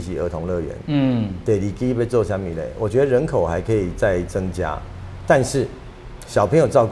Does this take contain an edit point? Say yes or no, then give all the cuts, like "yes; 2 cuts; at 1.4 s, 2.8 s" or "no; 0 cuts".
no; 0 cuts